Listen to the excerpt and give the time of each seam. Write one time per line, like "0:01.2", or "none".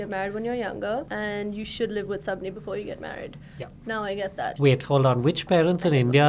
0:01.1
0:04.5

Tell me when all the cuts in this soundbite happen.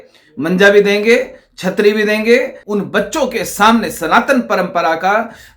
0:02.6

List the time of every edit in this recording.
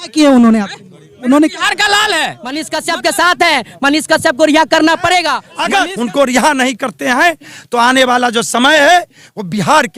0:02.7
0:05.8

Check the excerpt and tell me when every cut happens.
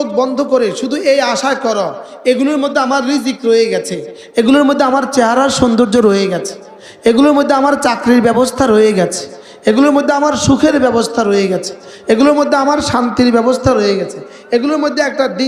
none

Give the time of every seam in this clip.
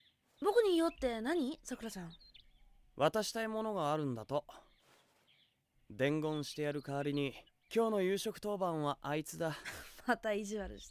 0:01.8
0:04.6
0:06.8
0:09.7

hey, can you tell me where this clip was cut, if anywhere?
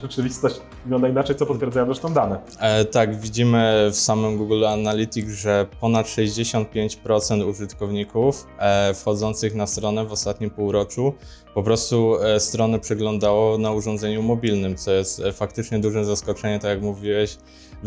none

